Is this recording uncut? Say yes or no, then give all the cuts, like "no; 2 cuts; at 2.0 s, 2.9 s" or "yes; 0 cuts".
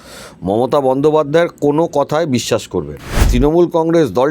no; 1 cut; at 3.3 s